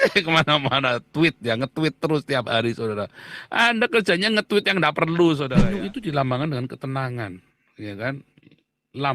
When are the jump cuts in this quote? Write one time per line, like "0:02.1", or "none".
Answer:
0:05.5